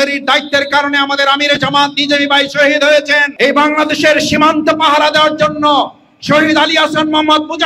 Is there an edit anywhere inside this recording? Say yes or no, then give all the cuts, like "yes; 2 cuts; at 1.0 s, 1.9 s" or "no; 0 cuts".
yes; 1 cut; at 3.3 s